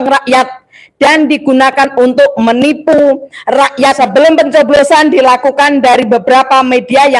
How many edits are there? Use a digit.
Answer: 1